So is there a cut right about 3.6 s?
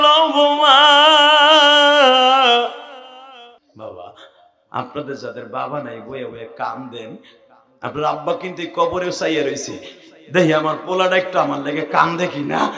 yes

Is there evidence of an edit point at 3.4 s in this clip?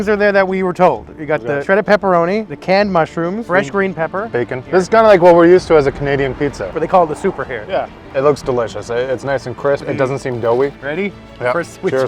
yes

